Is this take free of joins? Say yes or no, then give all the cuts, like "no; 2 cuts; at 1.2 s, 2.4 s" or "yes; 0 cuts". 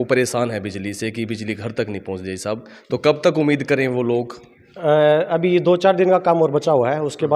yes; 0 cuts